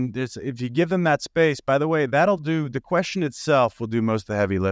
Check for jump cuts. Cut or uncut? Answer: uncut